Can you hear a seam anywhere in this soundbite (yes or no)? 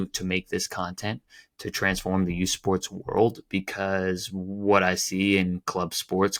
no